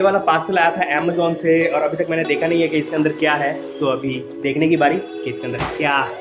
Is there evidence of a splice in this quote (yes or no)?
no